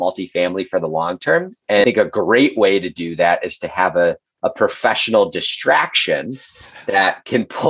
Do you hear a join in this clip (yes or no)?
yes